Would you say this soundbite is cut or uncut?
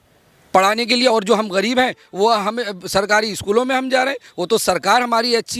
uncut